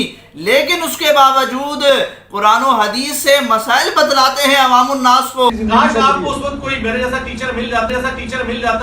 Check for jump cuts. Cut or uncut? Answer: cut